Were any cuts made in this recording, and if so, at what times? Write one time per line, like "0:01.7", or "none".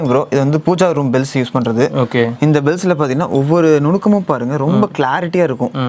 none